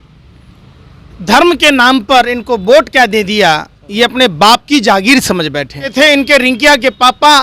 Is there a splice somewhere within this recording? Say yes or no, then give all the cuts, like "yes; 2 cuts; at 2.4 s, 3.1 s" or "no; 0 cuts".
yes; 1 cut; at 5.9 s